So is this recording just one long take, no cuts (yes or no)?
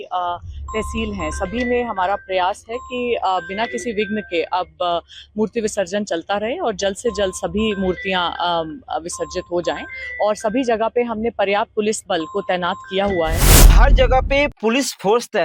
no